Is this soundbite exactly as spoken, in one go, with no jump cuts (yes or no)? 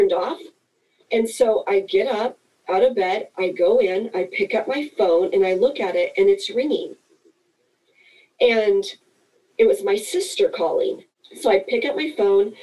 no